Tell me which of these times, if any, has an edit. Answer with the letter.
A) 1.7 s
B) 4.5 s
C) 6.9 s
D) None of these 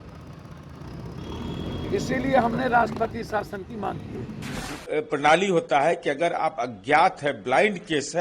B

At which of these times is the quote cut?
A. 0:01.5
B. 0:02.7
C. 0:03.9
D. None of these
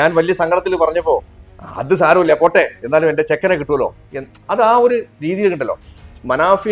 D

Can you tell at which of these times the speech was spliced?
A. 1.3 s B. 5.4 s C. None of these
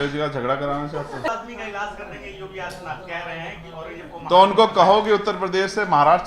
A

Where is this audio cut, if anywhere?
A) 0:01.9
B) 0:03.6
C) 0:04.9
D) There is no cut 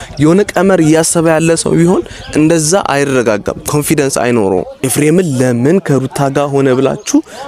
C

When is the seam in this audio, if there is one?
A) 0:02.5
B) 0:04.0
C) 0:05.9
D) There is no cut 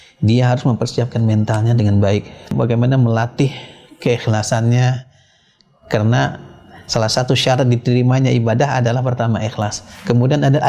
A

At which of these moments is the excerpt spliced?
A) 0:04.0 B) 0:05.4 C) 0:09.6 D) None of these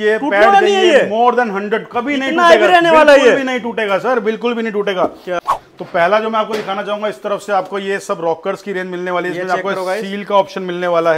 B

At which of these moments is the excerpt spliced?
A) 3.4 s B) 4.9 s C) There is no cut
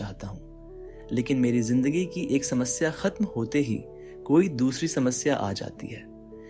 A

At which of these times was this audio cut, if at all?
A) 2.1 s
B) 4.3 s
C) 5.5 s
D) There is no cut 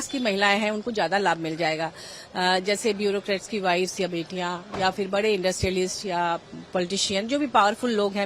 D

